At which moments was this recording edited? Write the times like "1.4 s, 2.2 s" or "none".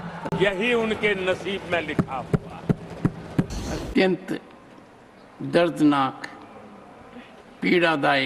3.6 s